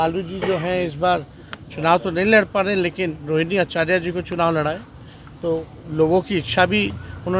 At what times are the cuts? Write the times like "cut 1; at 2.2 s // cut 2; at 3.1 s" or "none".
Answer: none